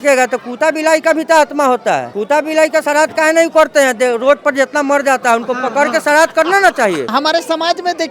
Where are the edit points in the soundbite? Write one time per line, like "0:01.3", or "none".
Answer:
0:02.1
0:07.1